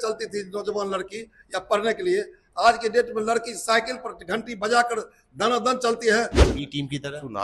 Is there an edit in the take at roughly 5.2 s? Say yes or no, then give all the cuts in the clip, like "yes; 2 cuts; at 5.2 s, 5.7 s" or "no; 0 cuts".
no; 1 cut; at 6.4 s